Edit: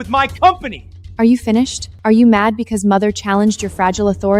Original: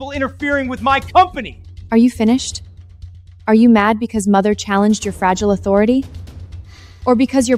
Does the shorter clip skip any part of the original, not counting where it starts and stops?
yes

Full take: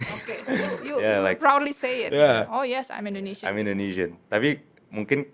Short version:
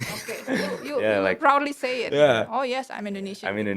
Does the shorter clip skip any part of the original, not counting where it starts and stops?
no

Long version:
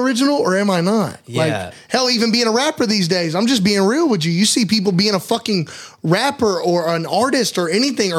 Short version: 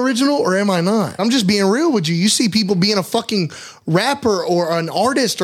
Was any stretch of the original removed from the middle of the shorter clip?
yes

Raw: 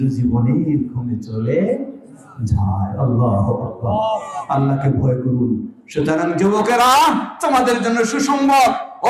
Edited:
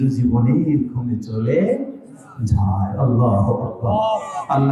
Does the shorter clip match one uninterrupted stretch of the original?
yes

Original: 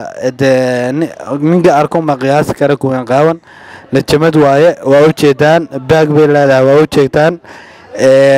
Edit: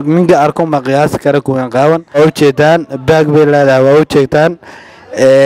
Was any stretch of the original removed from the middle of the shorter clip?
yes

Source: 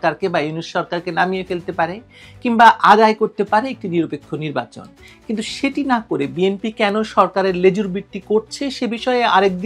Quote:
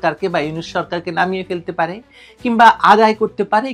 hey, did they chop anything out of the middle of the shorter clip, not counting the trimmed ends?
no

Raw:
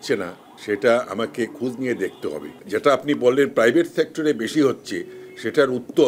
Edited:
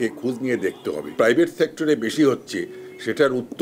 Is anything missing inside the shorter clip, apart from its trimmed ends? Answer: yes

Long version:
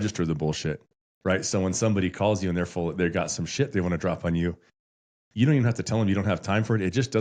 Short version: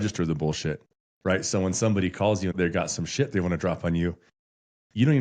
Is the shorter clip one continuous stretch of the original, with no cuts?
no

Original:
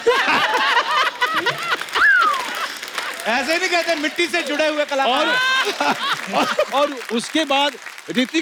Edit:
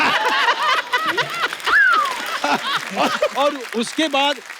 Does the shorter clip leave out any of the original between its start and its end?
yes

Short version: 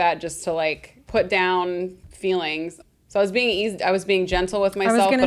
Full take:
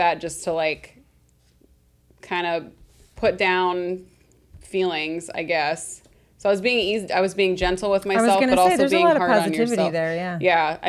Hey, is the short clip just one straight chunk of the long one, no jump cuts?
no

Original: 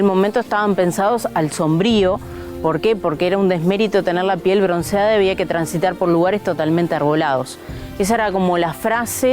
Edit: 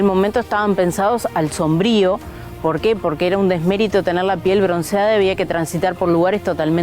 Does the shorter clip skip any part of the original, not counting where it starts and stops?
no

